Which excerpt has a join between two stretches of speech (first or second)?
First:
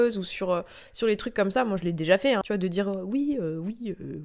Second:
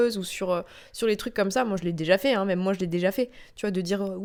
first